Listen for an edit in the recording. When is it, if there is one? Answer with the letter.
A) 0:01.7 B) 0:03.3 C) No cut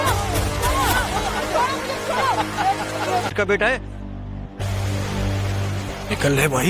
B